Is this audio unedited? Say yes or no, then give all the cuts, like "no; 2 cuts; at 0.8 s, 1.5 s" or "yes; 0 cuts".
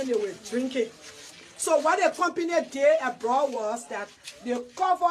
yes; 0 cuts